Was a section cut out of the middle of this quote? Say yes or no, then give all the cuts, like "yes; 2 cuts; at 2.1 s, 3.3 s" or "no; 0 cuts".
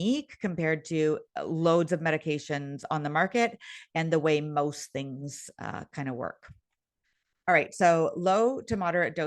no; 0 cuts